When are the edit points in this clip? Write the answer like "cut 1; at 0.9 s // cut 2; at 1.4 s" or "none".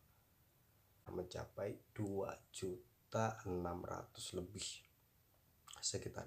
cut 1; at 1.0 s